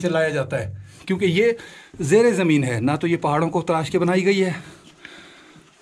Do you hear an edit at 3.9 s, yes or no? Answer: no